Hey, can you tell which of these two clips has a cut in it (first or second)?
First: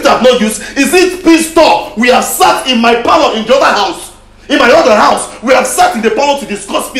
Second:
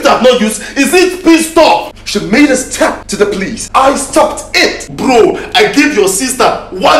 second